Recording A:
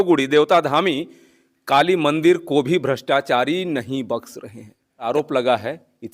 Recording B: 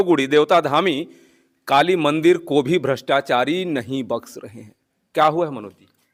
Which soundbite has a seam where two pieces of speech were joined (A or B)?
A